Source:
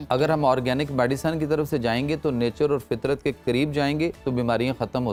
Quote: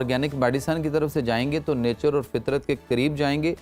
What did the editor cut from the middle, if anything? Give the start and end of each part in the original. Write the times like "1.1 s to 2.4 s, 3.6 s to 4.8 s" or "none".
none